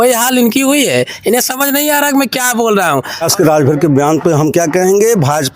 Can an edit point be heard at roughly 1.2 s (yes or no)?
no